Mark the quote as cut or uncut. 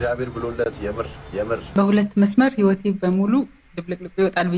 cut